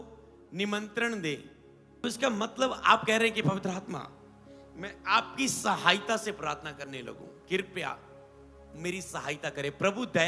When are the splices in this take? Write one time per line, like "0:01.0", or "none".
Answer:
0:02.0